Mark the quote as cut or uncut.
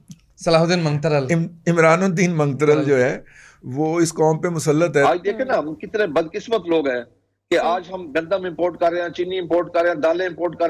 cut